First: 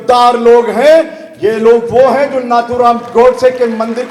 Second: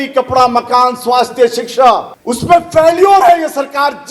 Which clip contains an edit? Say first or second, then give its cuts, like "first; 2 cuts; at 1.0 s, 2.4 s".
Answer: second; 1 cut; at 2.2 s